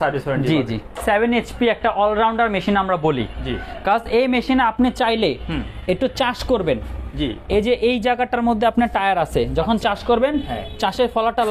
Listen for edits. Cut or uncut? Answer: cut